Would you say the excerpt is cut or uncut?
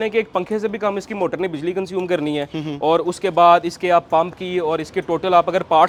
uncut